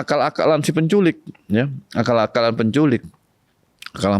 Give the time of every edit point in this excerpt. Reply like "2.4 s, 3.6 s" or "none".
none